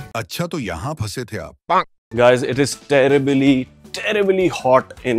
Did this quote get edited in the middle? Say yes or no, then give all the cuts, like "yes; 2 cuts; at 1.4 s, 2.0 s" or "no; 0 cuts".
yes; 1 cut; at 2.0 s